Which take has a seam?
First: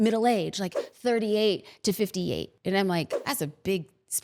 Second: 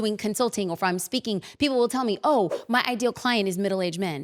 first; 2 cuts; at 2.5 s, 3.2 s

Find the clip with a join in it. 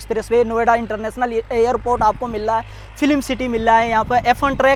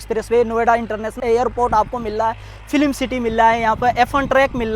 second; 1 cut; at 1.2 s

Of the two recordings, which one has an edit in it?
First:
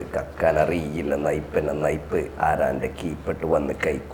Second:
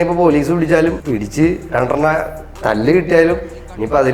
second; 1 cut; at 1.0 s

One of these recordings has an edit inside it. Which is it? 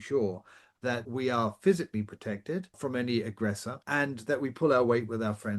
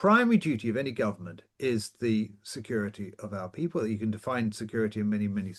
first; 3 cuts; at 1.0 s, 2.8 s, 3.8 s

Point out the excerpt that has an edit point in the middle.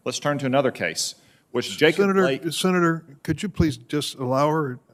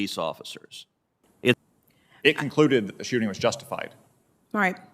second; 1 cut; at 1.6 s

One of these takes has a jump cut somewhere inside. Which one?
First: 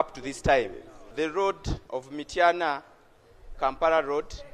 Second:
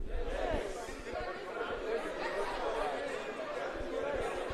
first; 2 cuts; at 1.1 s, 1.7 s

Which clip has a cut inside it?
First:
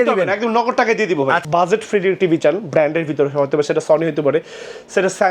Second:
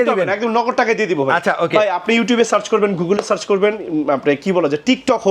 first; 1 cut; at 1.4 s

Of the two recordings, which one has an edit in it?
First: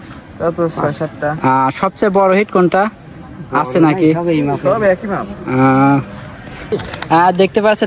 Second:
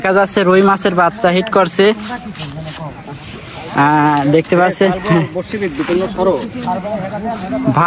first; 1 cut; at 6.7 s

